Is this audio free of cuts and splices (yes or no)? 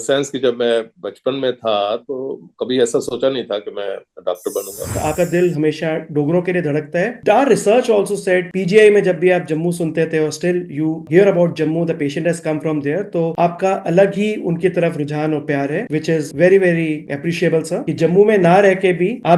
no